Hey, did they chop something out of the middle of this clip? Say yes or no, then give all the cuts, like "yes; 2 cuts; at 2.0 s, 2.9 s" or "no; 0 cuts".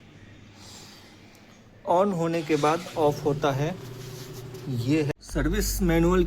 yes; 1 cut; at 5.1 s